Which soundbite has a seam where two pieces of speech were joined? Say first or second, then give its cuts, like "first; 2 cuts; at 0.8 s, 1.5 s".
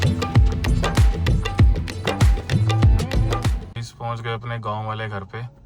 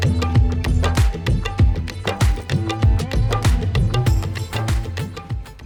first; 1 cut; at 3.5 s